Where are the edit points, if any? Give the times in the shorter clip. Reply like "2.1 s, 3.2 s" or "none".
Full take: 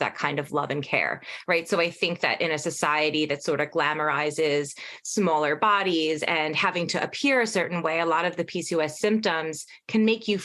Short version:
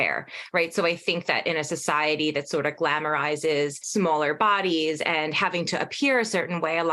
3.8 s